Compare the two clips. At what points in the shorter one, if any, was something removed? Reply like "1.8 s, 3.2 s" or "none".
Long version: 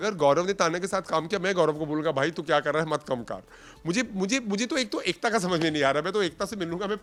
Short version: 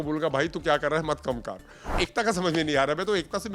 2.0 s